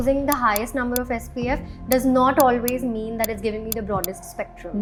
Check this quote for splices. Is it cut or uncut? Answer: uncut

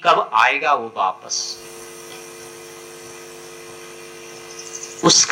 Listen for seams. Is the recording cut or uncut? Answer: uncut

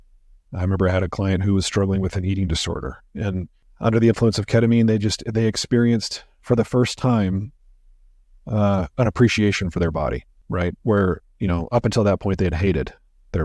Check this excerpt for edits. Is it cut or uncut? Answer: cut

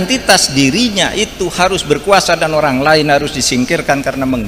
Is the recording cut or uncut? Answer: uncut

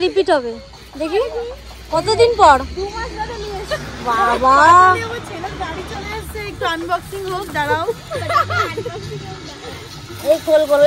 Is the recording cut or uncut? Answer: uncut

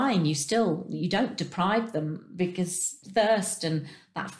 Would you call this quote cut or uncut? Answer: cut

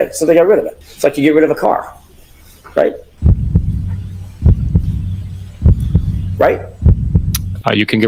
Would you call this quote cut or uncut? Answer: uncut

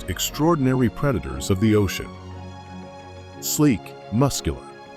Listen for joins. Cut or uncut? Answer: cut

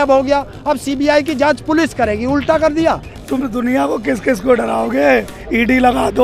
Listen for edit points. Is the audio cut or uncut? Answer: cut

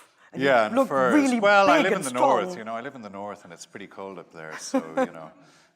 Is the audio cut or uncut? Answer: cut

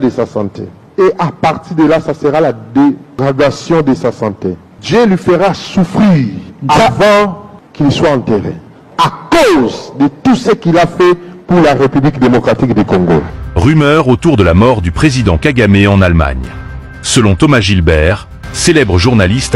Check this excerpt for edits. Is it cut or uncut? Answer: cut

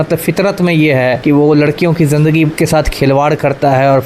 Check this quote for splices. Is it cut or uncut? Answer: cut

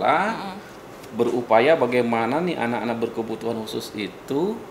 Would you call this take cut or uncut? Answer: uncut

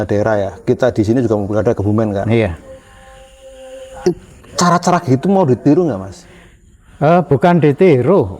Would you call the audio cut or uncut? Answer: uncut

